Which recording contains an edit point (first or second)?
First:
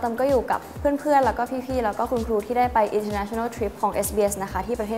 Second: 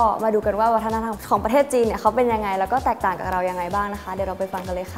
second